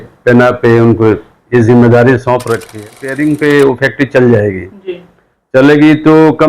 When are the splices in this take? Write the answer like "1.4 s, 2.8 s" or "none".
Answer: 2.9 s